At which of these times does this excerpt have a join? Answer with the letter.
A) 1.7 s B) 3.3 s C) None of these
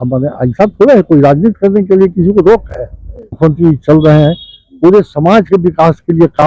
B